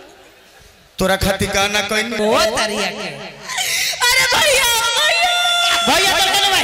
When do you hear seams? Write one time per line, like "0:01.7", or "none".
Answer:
0:02.2